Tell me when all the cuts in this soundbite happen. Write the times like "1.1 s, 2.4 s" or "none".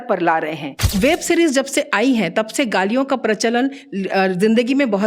0.9 s